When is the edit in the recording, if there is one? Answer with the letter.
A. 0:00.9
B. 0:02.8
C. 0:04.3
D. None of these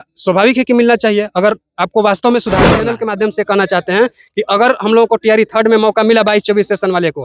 B